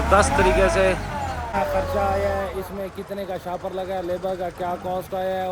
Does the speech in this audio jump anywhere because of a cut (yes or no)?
yes